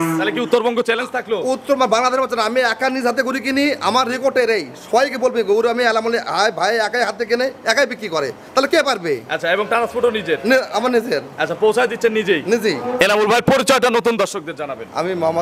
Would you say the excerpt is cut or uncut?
uncut